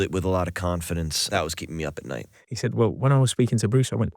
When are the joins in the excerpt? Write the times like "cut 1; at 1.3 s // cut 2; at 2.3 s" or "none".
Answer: cut 1; at 1.2 s // cut 2; at 2.4 s